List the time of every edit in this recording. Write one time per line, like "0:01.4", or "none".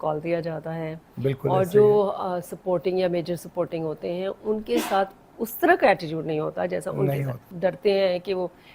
0:07.4